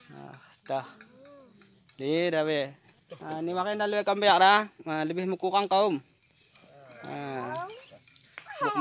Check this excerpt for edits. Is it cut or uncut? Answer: cut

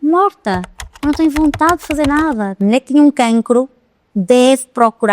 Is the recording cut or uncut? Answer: cut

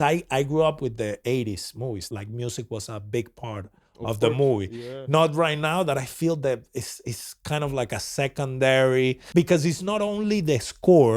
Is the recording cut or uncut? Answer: cut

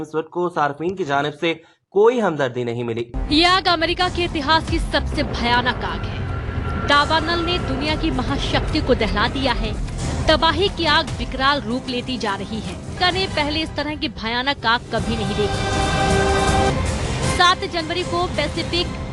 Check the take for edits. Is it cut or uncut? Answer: cut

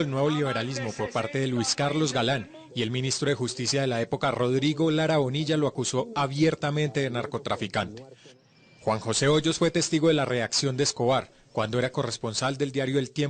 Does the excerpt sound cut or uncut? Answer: cut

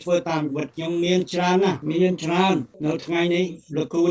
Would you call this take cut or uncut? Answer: cut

